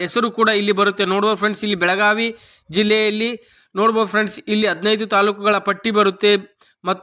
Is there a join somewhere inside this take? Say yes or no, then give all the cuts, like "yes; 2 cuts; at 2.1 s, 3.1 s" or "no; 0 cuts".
no; 0 cuts